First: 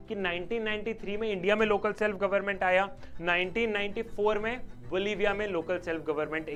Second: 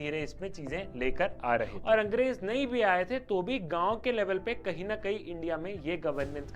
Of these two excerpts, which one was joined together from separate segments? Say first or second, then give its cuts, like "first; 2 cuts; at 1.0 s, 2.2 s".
second; 1 cut; at 1.8 s